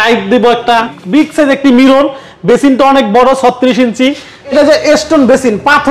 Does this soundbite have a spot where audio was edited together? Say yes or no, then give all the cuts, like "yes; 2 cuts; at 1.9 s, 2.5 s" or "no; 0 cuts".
yes; 2 cuts; at 1.0 s, 4.5 s